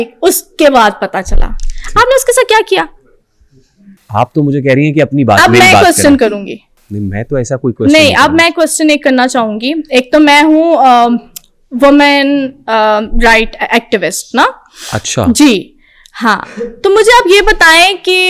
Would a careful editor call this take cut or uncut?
uncut